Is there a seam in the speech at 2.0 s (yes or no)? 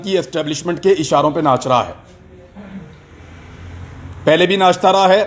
no